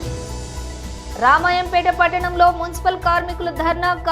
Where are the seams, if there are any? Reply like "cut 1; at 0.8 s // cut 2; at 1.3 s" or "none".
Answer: cut 1; at 1.1 s